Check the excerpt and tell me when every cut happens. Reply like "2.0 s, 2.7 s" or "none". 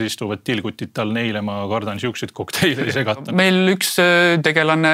3.3 s